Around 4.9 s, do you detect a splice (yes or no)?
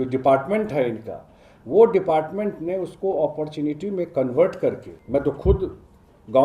yes